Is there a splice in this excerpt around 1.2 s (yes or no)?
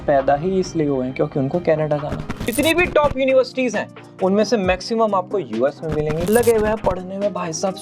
no